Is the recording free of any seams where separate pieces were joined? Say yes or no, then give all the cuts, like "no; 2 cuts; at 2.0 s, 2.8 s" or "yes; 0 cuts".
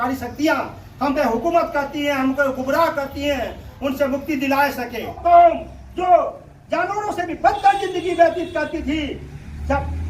no; 1 cut; at 5.2 s